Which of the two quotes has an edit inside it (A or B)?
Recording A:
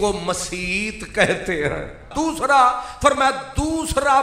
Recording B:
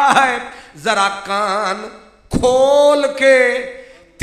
A